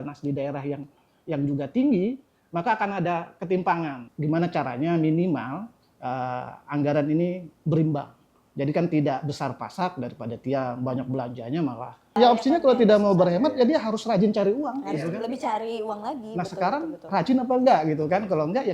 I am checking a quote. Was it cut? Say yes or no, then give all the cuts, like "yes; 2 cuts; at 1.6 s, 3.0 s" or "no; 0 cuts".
yes; 2 cuts; at 4.0 s, 12.2 s